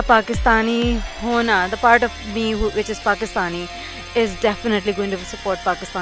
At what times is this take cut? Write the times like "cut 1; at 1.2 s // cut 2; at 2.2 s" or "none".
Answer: none